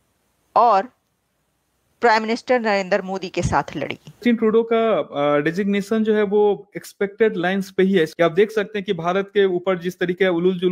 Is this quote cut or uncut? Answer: cut